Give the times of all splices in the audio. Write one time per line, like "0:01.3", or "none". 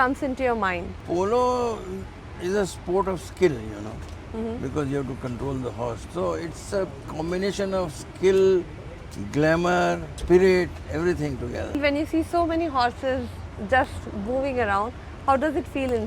0:00.9
0:10.1
0:11.8